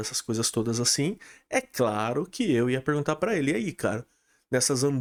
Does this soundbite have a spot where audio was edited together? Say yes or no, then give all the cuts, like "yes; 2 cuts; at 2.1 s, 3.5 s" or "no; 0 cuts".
no; 0 cuts